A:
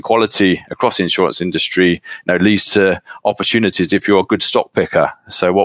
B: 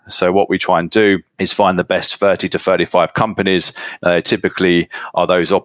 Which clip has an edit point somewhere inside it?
B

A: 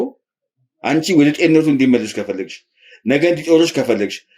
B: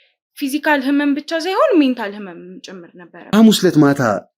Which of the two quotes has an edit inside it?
B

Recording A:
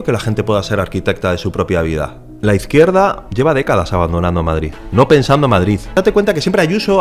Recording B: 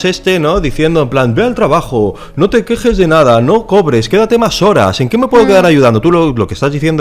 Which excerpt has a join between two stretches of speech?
A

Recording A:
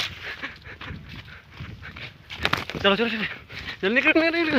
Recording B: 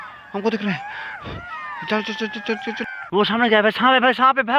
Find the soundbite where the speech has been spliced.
B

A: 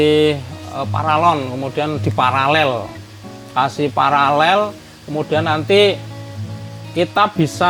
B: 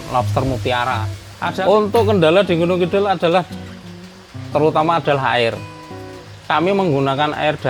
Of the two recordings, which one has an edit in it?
B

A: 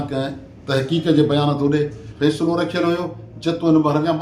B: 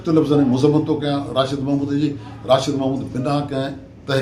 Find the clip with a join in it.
A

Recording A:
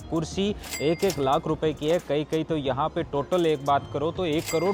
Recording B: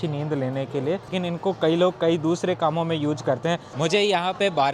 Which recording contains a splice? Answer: B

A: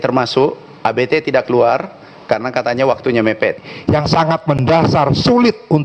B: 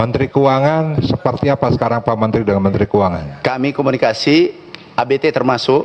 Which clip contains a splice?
A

